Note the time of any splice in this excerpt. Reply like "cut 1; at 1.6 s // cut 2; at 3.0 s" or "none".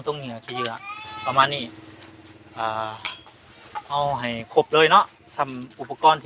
none